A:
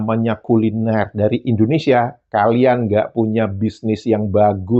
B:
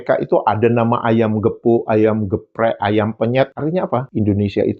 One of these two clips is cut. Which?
B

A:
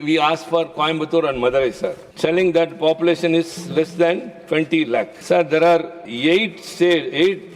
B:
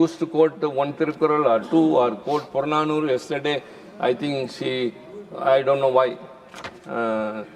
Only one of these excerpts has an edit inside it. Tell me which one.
A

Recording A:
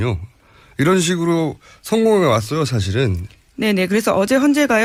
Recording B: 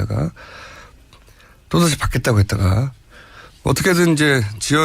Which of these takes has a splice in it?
B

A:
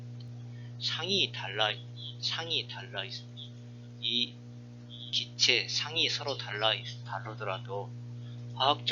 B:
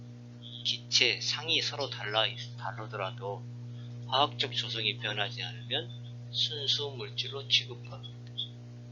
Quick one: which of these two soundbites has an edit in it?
A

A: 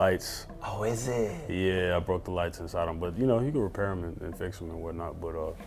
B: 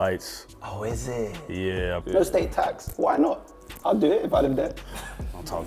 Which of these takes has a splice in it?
B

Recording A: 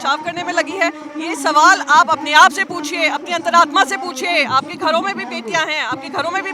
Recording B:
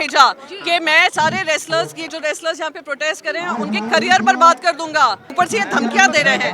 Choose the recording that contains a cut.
B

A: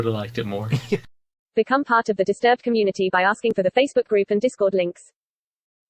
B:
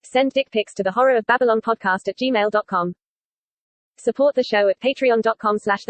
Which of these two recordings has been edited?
A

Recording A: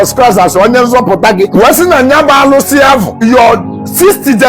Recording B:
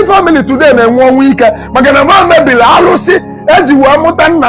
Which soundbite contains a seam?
A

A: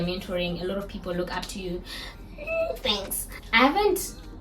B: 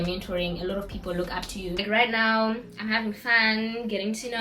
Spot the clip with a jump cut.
B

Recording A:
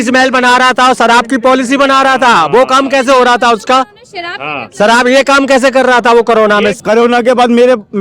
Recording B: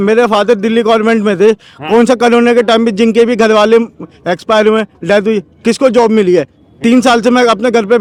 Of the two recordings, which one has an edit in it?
A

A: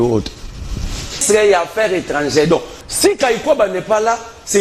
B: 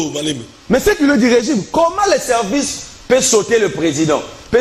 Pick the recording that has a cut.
A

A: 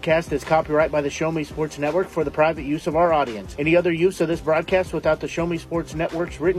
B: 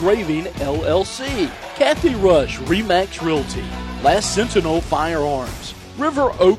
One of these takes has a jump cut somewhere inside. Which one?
B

